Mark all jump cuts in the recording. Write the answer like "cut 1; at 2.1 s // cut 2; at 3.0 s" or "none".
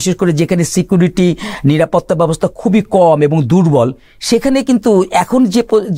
none